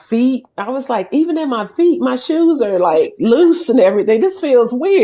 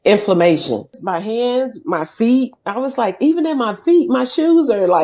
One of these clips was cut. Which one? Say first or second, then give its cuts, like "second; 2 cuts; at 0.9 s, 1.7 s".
second; 1 cut; at 1.0 s